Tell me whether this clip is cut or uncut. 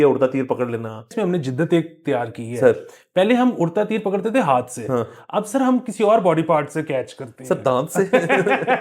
cut